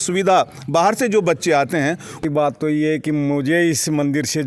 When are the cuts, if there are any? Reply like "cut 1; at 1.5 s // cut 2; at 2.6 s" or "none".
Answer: cut 1; at 2.2 s